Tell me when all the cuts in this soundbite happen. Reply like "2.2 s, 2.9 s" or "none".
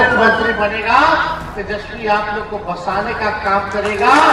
none